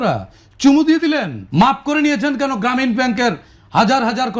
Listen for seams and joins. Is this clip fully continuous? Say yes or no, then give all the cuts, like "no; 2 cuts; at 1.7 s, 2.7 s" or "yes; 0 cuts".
no; 1 cut; at 1.4 s